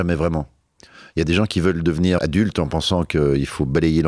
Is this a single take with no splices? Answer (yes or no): no